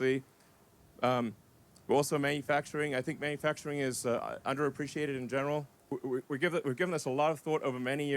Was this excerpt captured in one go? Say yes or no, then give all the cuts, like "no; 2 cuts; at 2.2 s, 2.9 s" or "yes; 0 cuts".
no; 1 cut; at 5.7 s